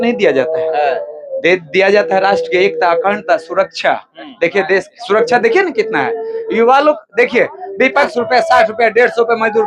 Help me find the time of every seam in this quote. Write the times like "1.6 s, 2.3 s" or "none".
8.1 s